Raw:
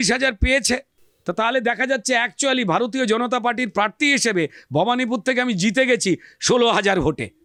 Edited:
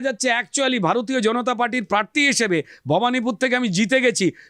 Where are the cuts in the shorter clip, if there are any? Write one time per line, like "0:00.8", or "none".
none